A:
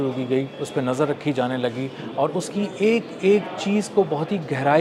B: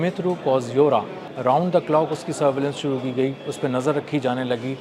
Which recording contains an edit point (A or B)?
B